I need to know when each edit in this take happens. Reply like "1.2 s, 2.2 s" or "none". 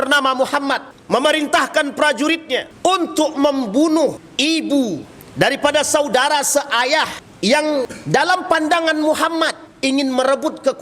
0.9 s, 2.7 s, 4.2 s, 5.2 s, 7.2 s, 8.0 s, 9.7 s